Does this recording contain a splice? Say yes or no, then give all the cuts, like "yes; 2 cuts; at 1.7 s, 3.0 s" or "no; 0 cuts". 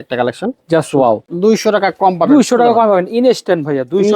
yes; 1 cut; at 1.3 s